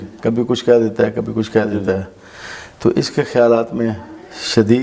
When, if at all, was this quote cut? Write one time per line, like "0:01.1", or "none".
none

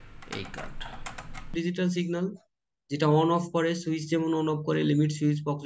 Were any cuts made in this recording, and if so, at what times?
0:01.5

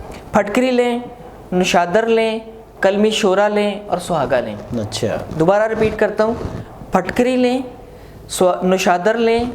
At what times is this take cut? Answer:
none

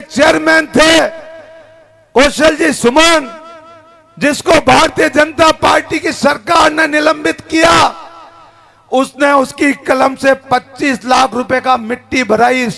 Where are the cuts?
none

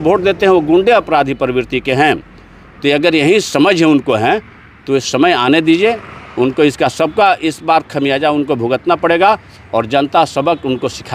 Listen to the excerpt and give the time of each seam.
none

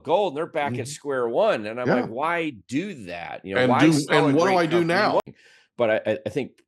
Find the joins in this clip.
0:05.2

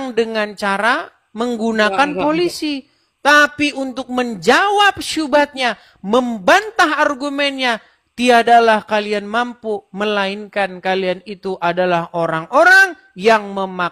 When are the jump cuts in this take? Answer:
none

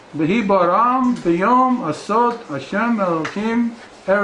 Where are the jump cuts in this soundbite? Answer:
none

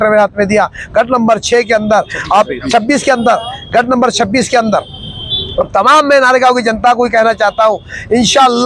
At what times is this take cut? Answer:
none

